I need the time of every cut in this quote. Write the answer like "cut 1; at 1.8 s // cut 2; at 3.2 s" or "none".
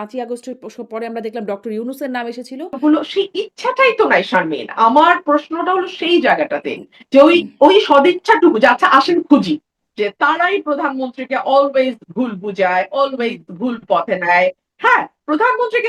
cut 1; at 2.8 s // cut 2; at 9.8 s